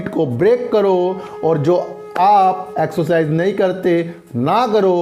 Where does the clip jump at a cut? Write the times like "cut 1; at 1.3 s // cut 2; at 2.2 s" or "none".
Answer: none